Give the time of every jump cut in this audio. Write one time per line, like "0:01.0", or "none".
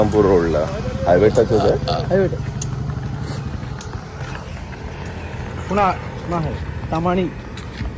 none